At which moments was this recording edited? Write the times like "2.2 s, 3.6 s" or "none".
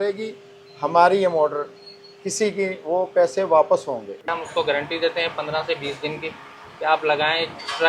4.3 s